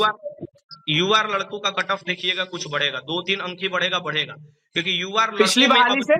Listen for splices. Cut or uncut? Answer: uncut